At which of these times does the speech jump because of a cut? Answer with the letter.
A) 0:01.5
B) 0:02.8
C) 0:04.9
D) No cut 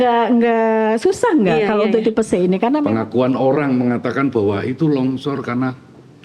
B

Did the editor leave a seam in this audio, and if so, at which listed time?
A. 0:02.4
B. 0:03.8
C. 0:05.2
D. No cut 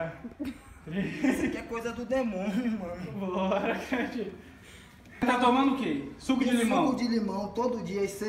C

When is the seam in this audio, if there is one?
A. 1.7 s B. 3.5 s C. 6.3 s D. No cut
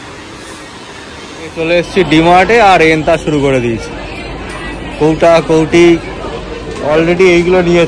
A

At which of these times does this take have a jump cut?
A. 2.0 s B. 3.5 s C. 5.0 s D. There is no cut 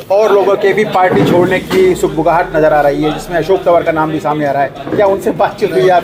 D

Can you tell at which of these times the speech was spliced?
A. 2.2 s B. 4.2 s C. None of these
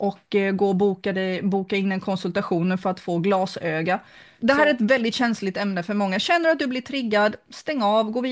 B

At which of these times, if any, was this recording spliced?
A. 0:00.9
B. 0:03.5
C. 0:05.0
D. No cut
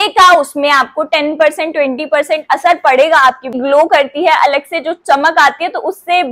B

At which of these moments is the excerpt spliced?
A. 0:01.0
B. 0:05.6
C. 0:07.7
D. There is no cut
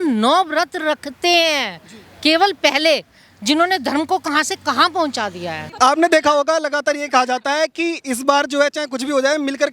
B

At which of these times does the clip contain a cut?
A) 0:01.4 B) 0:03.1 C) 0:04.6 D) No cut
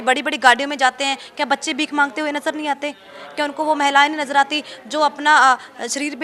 D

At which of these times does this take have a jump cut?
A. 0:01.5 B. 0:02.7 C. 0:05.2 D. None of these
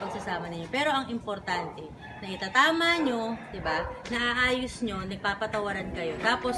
D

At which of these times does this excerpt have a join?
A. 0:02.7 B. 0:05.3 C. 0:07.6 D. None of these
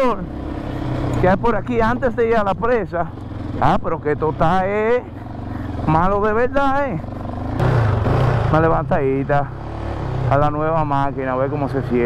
C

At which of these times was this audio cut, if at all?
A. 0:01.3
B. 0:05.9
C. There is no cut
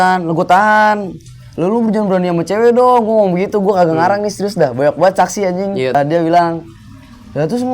B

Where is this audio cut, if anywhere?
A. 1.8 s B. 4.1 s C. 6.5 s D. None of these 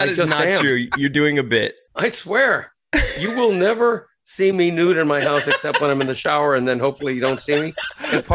A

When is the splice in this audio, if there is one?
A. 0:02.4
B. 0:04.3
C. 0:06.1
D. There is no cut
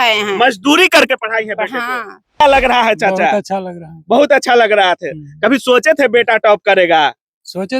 A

